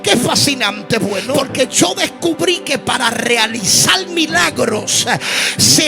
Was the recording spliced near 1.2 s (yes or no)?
yes